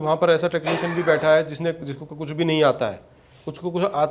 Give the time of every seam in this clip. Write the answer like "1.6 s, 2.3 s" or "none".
none